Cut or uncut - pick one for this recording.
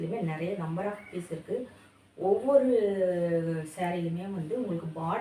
uncut